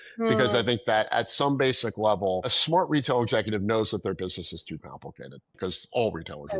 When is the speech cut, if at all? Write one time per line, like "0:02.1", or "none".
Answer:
0:02.5
0:05.5

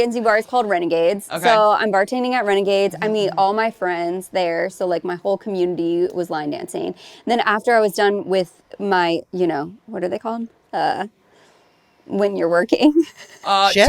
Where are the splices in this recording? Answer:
none

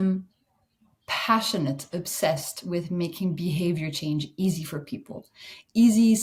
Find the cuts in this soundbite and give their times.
none

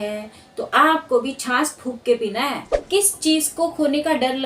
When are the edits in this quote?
0:02.7

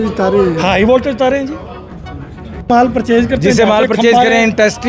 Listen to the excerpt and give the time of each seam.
0:02.7

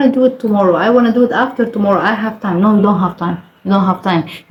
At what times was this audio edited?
none

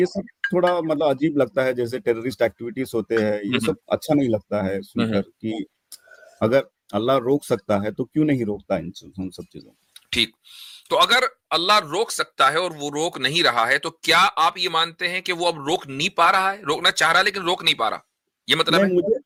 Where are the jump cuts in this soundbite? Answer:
none

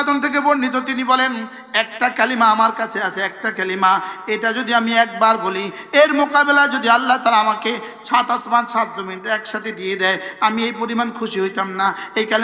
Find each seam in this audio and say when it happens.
none

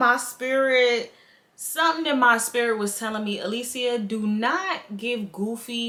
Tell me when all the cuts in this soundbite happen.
none

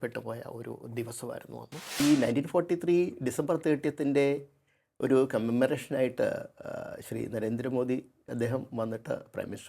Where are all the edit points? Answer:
0:02.0

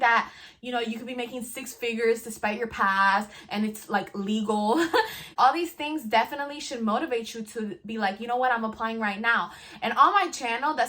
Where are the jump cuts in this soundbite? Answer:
0:05.3

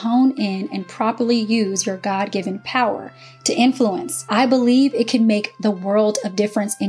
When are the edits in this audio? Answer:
0:04.1

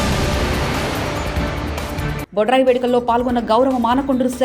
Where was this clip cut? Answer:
0:01.8

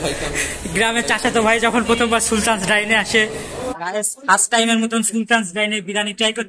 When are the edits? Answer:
0:03.5

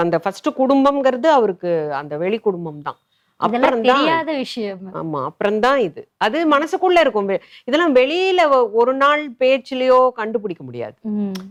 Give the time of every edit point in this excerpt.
none

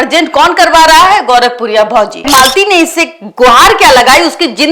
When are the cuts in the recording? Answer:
0:02.3

